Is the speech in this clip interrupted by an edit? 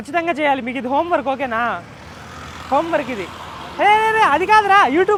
no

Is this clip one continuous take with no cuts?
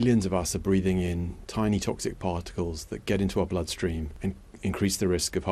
no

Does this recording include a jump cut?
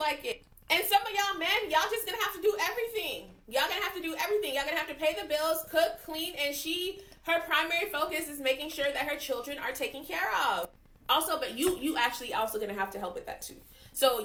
no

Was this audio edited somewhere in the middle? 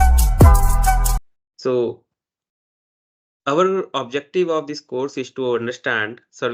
yes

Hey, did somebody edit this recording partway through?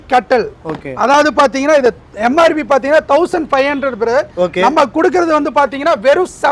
no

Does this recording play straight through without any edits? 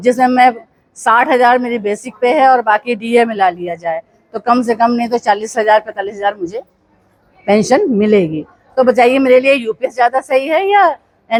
yes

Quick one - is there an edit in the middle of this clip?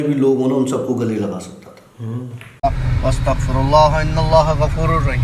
yes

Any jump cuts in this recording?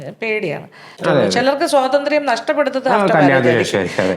yes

